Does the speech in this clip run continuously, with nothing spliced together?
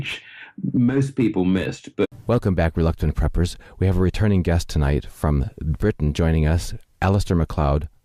yes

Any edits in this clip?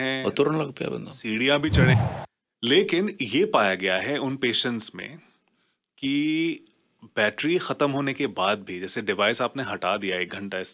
yes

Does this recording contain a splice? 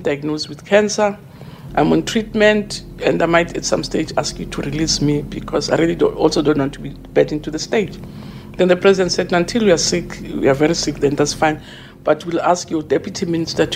no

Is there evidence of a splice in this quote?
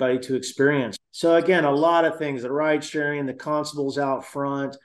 yes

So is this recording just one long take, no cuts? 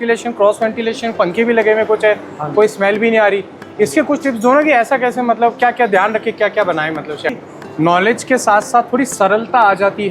no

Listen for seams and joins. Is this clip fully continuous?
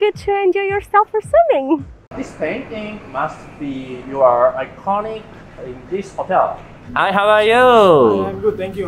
no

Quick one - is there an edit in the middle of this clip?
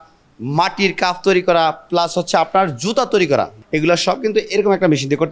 yes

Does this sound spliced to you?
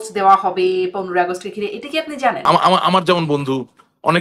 yes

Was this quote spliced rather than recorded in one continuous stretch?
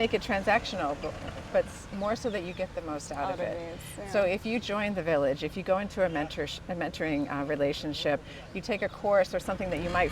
no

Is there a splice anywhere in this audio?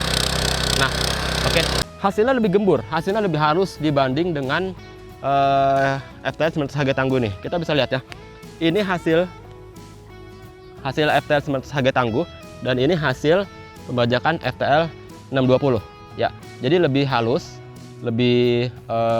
yes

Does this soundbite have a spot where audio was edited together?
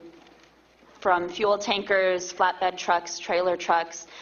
no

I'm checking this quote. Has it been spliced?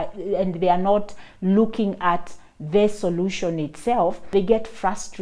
yes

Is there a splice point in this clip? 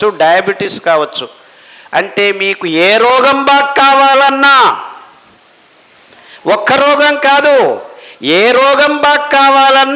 no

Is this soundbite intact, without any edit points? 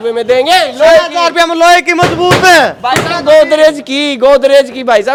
yes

